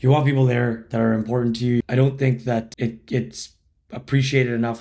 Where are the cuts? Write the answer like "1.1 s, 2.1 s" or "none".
1.8 s, 2.7 s

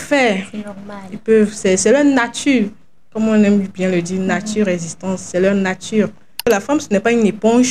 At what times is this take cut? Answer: 6.4 s

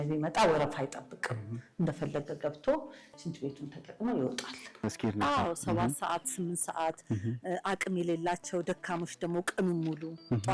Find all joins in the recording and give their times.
4.8 s

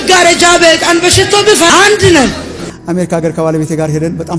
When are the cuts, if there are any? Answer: 1.7 s, 2.7 s

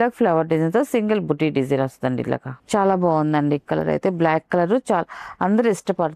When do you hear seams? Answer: none

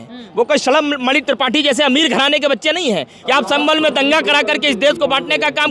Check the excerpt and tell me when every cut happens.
3.1 s

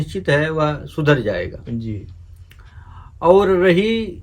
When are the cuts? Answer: none

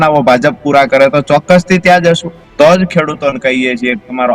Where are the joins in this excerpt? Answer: 2.4 s

